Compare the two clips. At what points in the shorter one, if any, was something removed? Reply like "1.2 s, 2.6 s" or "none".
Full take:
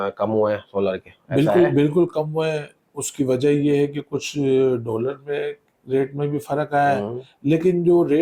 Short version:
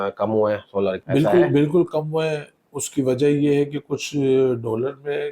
1.0 s

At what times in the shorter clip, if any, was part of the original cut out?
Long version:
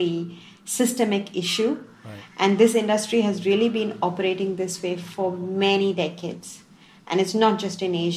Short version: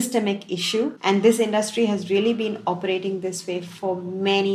1.0 s

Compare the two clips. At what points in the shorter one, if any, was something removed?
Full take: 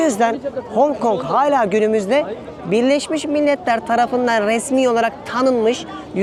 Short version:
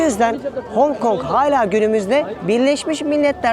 2.4 s

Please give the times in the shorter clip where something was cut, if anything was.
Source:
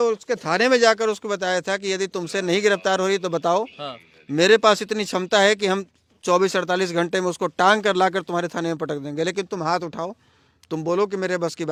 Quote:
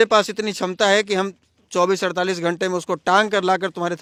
none

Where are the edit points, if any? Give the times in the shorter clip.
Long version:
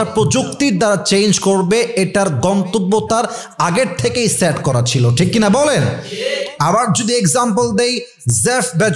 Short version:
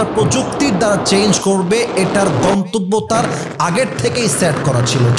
none

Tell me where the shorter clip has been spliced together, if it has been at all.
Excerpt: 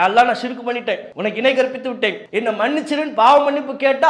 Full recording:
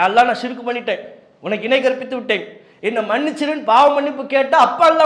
1.1 s, 2.2 s

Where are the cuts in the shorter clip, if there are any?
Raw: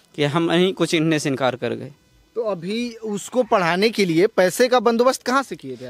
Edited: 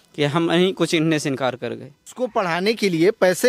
2.0 s

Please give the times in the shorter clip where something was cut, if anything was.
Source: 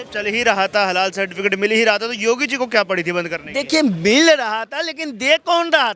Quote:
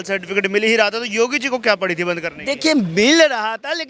none

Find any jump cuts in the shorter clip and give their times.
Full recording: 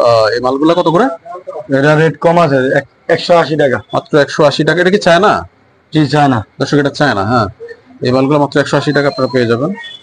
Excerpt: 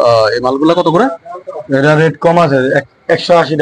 none

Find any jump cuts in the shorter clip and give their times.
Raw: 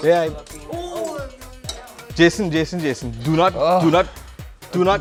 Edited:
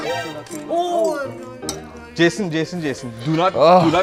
none

